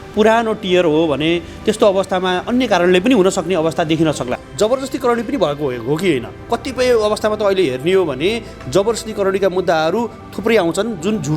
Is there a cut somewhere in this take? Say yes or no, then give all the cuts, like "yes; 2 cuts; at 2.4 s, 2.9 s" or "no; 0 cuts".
yes; 1 cut; at 4.4 s